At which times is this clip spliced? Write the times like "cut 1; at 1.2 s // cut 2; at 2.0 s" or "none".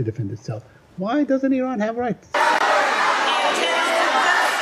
cut 1; at 2.3 s